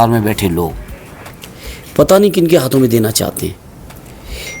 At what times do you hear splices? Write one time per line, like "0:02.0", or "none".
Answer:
none

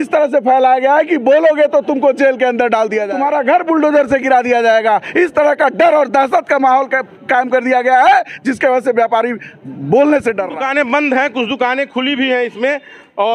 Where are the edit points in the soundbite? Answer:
0:03.1
0:10.5

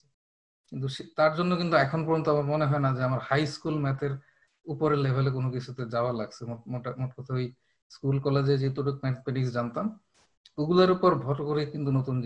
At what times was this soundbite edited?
none

